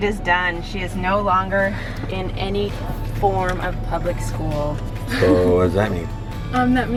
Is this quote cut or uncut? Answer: uncut